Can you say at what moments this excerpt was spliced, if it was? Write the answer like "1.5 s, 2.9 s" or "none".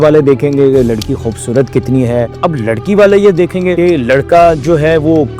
2.3 s